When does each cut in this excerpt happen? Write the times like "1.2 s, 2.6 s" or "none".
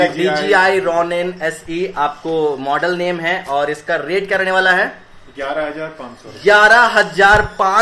none